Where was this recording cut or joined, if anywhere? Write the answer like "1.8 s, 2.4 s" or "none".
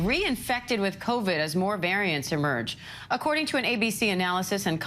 3.2 s

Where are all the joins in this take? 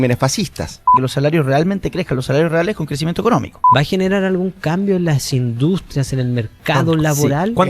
1.0 s, 3.6 s

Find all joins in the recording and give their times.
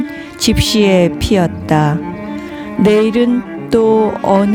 none

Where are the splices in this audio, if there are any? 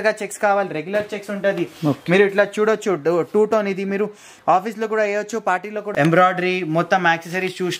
5.8 s

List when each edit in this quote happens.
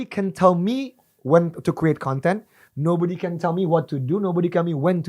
none

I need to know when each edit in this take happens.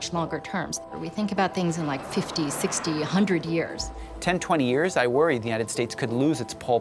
1.0 s, 4.1 s

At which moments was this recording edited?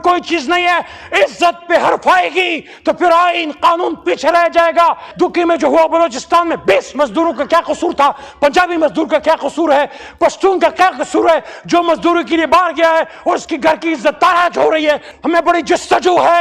5.1 s, 15.1 s

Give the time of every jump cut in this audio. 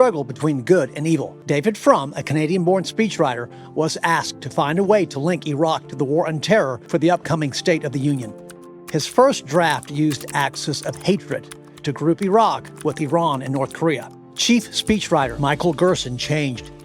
1.3 s, 6.8 s

